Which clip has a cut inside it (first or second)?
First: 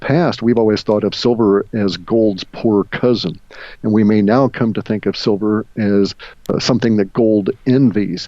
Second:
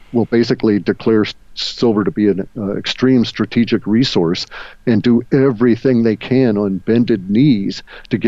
first